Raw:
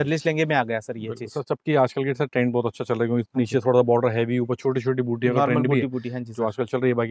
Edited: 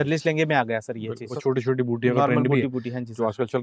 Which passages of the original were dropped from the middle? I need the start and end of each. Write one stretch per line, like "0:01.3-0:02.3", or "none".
0:01.4-0:04.5